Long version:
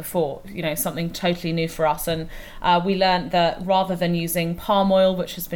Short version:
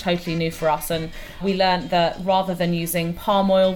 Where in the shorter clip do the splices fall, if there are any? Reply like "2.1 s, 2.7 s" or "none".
1.4 s